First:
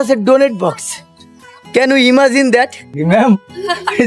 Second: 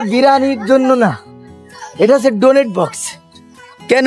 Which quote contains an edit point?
first; 1 cut; at 2.9 s

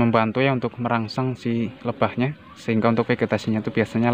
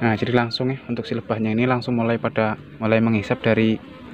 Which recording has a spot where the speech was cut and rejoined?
second; 1 cut; at 2.7 s

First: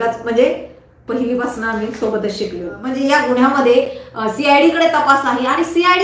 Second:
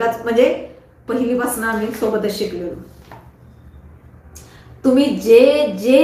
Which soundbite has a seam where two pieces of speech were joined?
first; 1 cut; at 2.8 s

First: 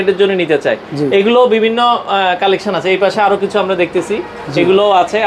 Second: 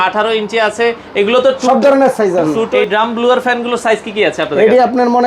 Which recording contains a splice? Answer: second; 1 cut; at 2.7 s

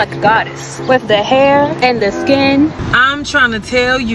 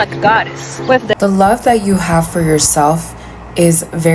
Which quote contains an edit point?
second; 1 cut; at 1.1 s

